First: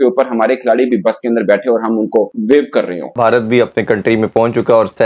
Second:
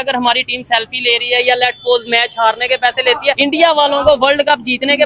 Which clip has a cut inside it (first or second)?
first